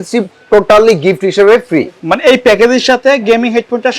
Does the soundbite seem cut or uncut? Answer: cut